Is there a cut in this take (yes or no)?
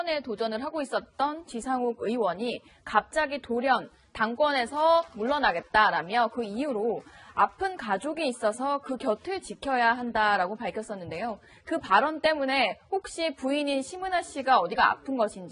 no